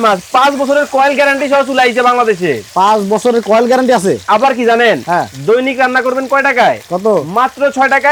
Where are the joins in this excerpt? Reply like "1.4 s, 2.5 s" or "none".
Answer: none